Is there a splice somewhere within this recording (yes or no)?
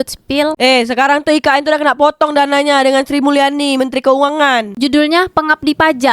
yes